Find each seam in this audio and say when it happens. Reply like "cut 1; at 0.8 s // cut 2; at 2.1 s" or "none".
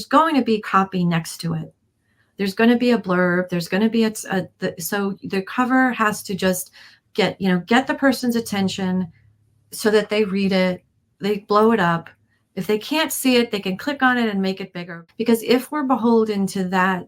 cut 1; at 14.9 s